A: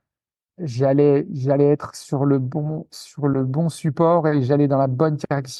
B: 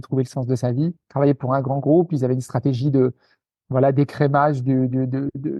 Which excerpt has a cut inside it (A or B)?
B